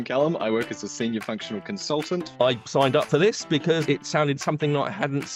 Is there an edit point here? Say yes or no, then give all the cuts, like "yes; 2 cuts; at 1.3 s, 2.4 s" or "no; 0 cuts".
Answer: no; 0 cuts